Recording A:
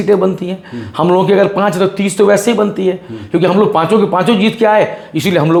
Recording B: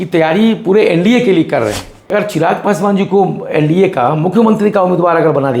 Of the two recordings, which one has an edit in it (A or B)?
B